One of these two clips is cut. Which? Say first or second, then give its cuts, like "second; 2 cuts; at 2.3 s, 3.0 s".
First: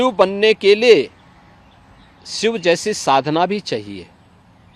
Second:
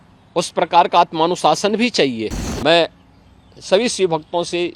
second; 1 cut; at 2.4 s